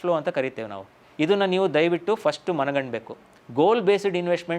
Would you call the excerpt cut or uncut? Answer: cut